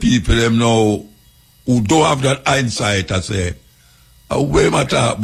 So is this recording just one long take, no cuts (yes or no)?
yes